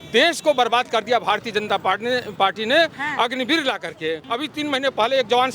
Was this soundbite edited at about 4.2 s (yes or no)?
yes